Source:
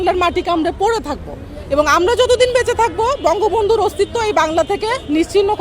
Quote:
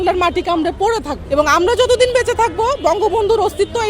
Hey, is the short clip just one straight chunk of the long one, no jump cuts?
no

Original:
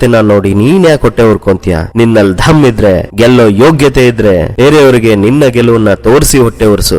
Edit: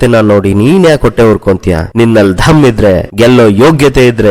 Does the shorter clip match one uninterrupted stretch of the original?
yes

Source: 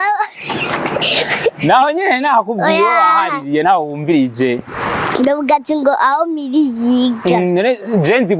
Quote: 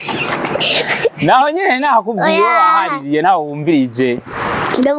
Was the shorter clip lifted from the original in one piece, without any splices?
yes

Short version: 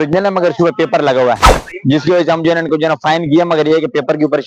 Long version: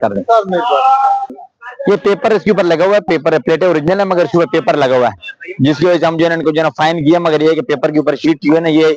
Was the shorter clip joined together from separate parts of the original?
no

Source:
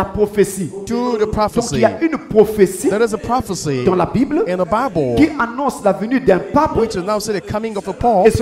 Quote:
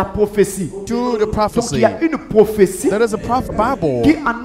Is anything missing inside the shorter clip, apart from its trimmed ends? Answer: yes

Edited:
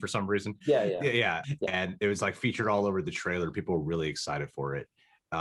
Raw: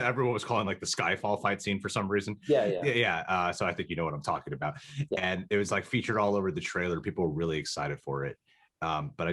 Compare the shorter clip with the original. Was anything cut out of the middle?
yes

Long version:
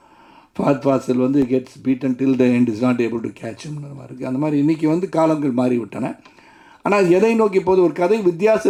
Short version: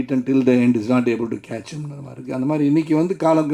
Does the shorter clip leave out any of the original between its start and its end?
no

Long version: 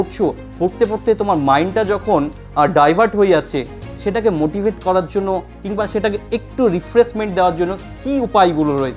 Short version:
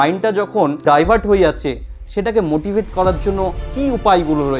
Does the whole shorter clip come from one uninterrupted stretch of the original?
no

